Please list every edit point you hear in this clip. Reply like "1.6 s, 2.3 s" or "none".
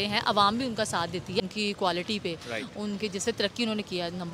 1.5 s

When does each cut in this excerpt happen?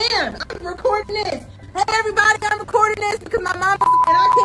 none

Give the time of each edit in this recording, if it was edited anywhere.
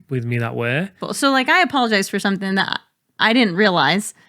1.0 s

